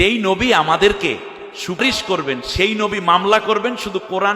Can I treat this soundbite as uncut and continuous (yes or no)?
no